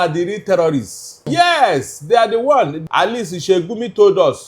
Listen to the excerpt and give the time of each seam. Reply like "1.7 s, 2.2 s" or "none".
1.2 s, 2.8 s